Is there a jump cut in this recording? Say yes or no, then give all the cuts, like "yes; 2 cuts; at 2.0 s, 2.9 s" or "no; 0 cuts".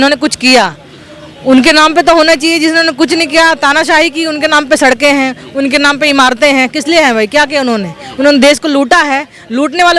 no; 0 cuts